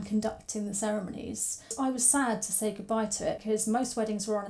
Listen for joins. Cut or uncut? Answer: cut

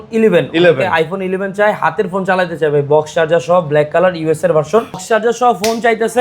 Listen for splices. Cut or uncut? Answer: cut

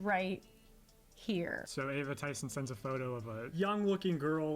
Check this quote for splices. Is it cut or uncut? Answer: cut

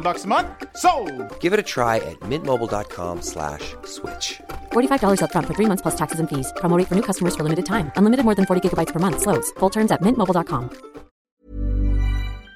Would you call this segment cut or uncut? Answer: cut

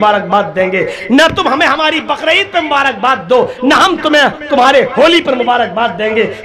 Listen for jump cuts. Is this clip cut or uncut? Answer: uncut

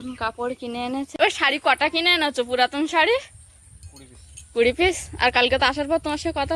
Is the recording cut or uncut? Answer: cut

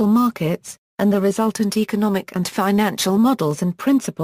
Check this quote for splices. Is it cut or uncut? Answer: cut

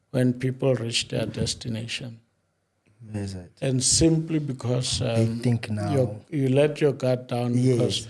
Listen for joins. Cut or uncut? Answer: uncut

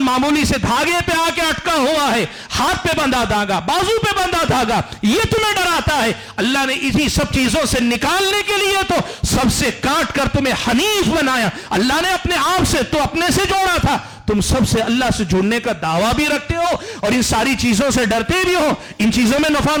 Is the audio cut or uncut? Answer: uncut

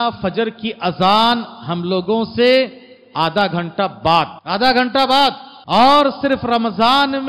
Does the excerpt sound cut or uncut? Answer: cut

